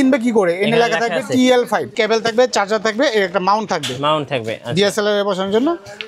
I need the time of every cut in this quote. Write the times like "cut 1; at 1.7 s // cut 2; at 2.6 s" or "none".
cut 1; at 1.9 s